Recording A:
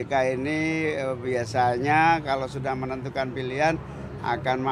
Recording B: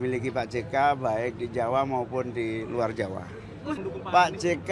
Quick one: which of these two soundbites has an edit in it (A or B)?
B